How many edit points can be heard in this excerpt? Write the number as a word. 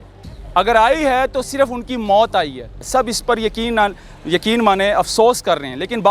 one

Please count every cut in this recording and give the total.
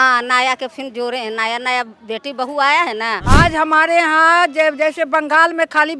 one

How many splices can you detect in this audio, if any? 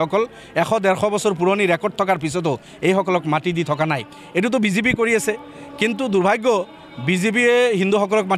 zero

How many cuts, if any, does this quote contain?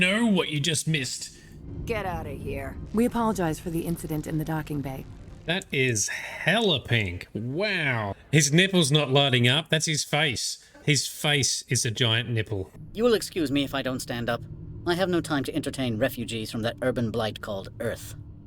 three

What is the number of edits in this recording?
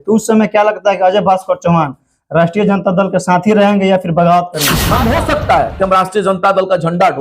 one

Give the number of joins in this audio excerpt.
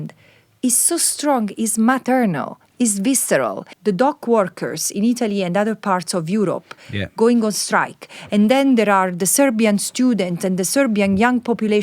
one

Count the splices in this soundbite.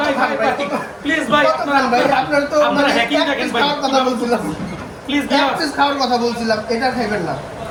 zero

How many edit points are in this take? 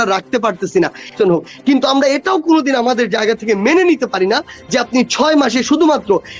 one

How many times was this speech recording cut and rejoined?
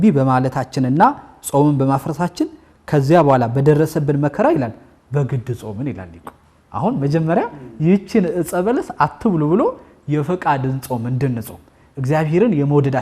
zero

